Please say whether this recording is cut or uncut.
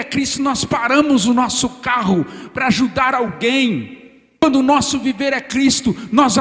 cut